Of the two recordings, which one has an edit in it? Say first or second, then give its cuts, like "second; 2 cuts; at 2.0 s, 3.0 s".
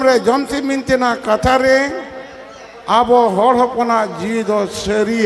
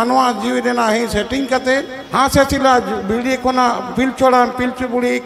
second; 1 cut; at 2.0 s